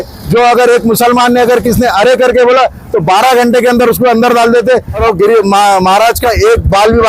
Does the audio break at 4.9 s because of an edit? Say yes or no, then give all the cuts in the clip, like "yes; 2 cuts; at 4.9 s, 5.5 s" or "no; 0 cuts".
yes; 1 cut; at 4.9 s